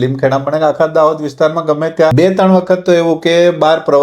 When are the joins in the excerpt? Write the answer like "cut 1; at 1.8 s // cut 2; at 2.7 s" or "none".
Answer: cut 1; at 2.1 s